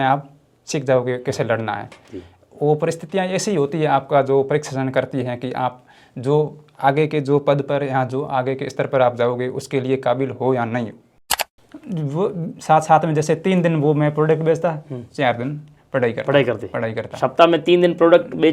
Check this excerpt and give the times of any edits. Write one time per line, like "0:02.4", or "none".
0:11.4